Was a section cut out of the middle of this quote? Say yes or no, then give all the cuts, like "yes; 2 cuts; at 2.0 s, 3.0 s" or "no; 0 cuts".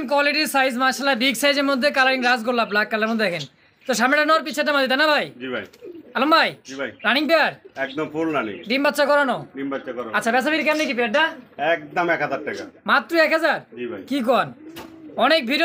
no; 0 cuts